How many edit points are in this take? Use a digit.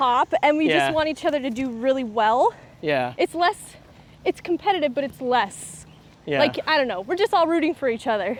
0